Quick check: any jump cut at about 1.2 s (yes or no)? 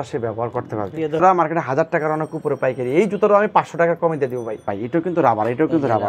yes